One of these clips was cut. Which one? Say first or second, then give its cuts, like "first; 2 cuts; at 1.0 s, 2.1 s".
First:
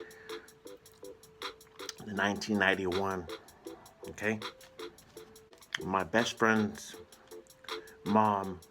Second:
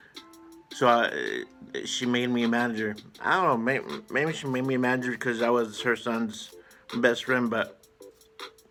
first; 1 cut; at 5.6 s